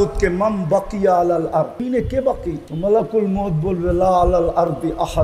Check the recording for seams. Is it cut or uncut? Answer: cut